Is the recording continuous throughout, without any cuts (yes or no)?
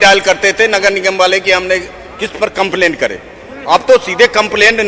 yes